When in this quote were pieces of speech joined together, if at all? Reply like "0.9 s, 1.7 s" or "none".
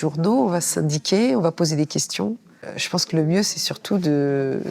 2.5 s